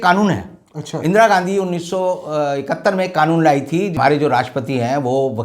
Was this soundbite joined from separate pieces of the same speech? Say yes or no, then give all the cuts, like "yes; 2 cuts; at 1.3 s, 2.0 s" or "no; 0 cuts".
yes; 1 cut; at 4.0 s